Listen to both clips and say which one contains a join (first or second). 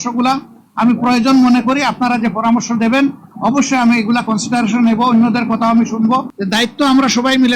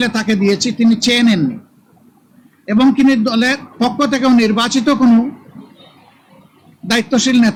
first